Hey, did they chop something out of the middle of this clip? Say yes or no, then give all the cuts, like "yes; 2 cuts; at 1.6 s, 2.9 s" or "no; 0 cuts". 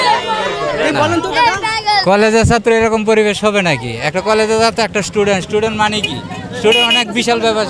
no; 0 cuts